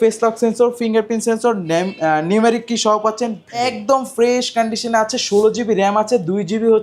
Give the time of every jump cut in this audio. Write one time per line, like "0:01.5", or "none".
0:03.6